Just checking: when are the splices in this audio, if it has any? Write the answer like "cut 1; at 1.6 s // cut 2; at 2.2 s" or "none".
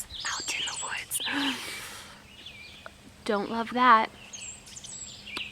none